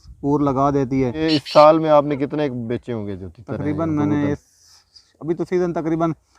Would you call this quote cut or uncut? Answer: cut